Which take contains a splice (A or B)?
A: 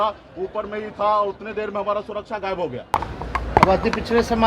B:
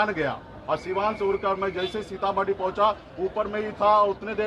A